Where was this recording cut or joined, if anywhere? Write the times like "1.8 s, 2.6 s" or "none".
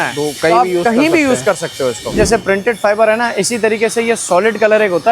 2.2 s